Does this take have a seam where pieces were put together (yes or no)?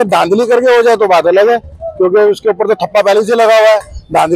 no